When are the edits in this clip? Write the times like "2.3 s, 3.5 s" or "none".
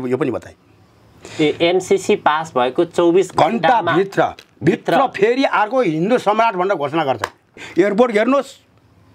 7.6 s